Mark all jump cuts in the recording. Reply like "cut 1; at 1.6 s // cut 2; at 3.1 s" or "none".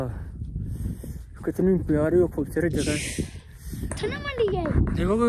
none